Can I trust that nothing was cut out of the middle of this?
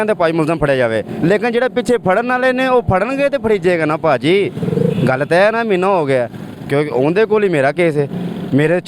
yes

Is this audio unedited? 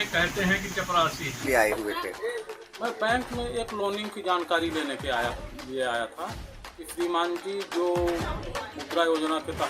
no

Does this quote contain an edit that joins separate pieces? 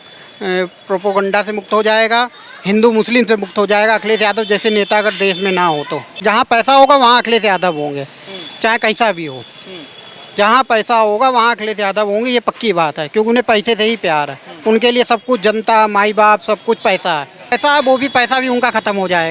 yes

